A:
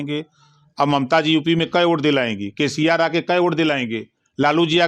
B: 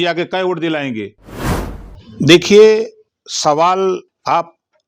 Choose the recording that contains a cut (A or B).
B